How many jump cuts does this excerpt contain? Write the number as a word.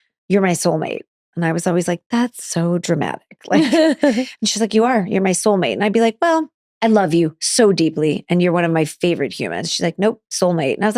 one